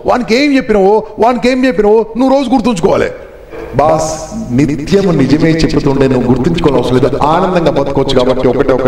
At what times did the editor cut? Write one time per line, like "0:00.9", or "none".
0:03.6